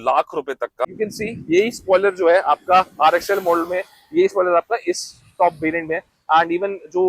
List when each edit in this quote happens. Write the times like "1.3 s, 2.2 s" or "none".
0.9 s